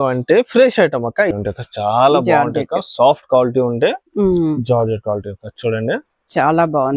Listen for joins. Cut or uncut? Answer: cut